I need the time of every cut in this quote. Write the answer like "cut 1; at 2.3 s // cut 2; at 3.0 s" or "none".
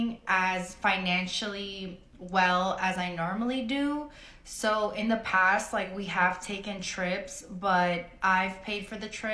none